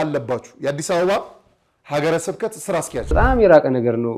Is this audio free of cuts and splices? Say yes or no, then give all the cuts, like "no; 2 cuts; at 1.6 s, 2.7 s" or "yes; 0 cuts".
no; 1 cut; at 3.1 s